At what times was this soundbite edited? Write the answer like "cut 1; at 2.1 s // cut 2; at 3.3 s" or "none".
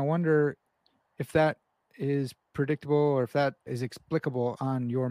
cut 1; at 3.7 s